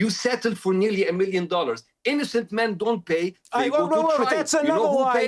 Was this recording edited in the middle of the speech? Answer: no; 0 cuts

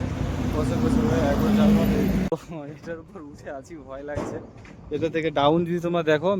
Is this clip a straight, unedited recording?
no; 1 cut; at 2.3 s

